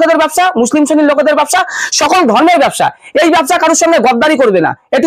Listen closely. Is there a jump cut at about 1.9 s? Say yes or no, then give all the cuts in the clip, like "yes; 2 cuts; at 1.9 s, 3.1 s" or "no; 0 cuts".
no; 0 cuts